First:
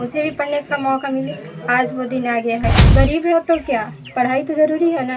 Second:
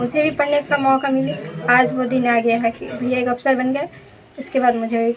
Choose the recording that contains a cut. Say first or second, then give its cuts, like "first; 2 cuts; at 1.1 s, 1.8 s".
first; 1 cut; at 2.8 s